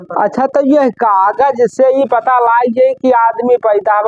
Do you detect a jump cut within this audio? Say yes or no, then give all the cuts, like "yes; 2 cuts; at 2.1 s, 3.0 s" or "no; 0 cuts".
no; 0 cuts